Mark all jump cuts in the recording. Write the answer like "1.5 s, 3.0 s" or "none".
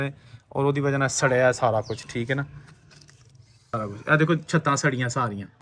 3.7 s